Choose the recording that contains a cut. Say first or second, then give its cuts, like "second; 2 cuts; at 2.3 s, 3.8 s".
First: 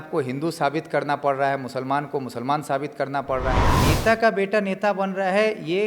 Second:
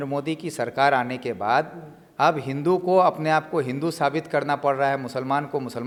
first; 1 cut; at 3.8 s